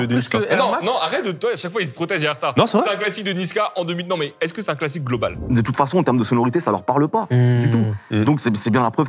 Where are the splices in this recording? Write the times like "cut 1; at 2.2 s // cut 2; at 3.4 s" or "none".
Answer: cut 1; at 5.4 s